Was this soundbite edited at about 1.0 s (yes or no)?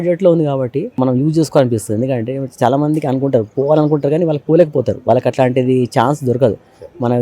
yes